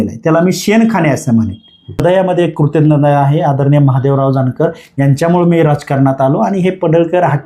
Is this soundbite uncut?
no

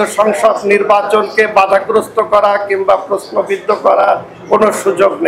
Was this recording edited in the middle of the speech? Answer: no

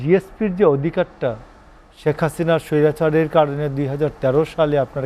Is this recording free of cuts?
yes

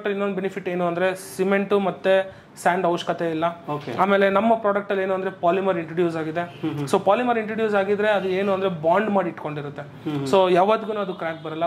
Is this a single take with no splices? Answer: yes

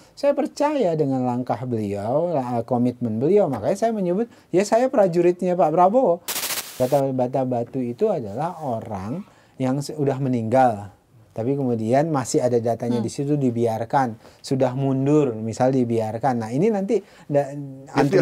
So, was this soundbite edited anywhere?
yes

